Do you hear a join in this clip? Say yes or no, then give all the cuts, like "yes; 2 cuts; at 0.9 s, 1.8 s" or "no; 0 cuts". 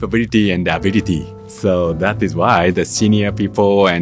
yes; 1 cut; at 1.3 s